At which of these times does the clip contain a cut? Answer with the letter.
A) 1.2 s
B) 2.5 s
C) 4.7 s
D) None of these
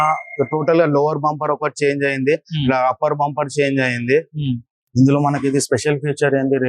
C